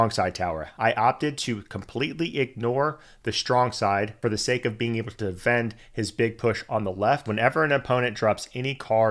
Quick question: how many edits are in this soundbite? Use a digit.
2